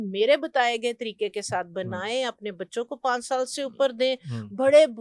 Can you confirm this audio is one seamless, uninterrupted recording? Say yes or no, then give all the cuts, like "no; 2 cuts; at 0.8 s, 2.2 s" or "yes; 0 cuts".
yes; 0 cuts